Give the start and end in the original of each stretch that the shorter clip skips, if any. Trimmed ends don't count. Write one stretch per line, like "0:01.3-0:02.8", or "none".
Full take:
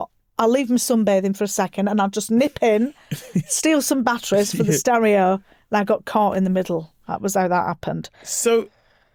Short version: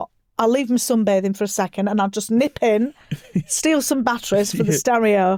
none